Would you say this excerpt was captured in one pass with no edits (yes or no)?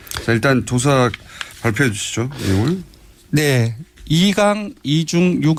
yes